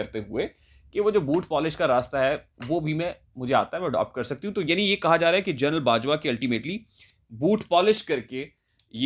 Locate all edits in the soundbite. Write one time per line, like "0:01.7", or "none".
none